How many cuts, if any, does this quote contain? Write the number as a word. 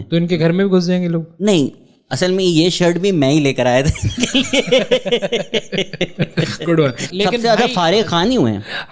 one